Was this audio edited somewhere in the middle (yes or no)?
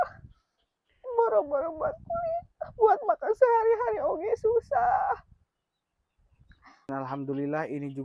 yes